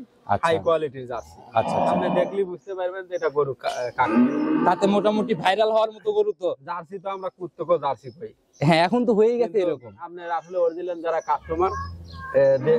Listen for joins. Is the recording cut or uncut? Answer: uncut